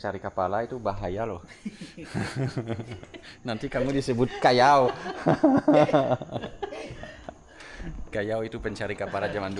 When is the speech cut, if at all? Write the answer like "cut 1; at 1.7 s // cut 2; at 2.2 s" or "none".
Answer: none